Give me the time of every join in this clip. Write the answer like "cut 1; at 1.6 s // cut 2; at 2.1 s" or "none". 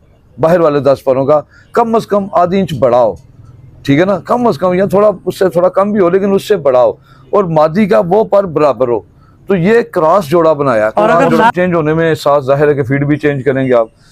cut 1; at 11.5 s